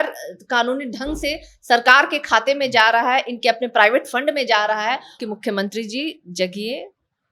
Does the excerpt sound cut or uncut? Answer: cut